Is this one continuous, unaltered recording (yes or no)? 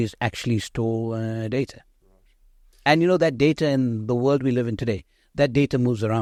yes